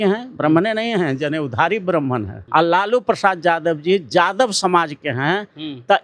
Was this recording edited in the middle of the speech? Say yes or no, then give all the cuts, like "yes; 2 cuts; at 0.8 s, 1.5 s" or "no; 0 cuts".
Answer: yes; 1 cut; at 2.4 s